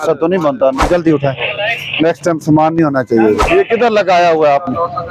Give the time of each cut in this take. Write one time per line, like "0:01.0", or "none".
0:00.9
0:03.4

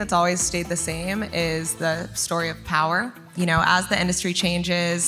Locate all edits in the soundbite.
0:03.3

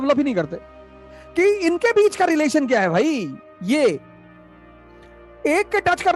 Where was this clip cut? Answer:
none

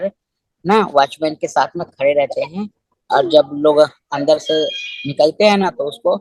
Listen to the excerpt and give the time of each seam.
none

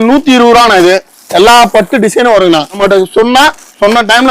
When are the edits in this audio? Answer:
0:02.8

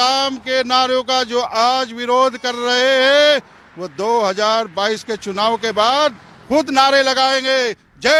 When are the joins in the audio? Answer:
none

